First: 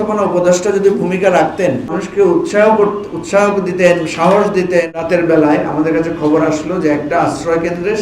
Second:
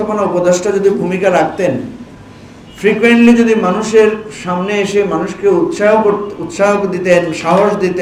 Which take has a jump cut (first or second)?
first